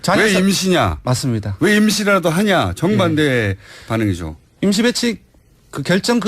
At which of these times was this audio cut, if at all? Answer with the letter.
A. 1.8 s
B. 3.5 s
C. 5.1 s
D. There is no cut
C